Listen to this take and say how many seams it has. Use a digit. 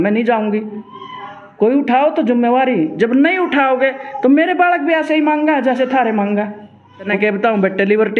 1